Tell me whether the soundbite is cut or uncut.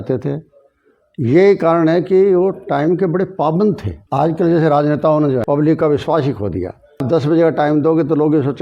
cut